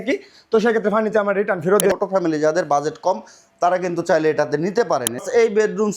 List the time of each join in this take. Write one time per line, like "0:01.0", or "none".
0:01.9
0:05.2